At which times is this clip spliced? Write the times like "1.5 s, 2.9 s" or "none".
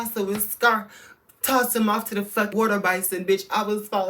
none